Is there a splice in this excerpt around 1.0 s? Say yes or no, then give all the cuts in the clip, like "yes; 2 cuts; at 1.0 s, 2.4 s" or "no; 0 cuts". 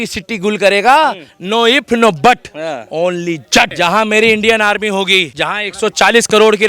no; 2 cuts; at 3.7 s, 5.3 s